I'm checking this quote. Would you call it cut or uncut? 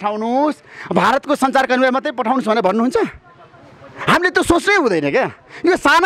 uncut